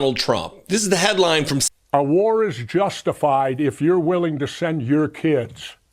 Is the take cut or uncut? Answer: cut